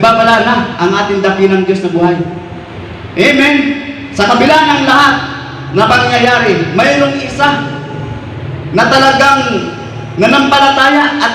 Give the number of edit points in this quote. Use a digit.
0